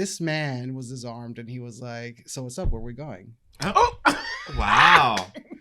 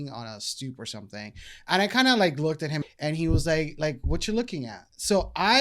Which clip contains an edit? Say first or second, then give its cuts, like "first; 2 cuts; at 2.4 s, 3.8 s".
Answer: second; 1 cut; at 2.8 s